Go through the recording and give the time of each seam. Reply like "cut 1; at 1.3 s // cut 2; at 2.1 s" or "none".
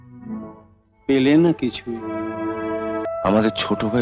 cut 1; at 3.1 s